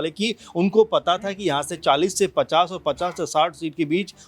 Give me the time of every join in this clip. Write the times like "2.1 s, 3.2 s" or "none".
none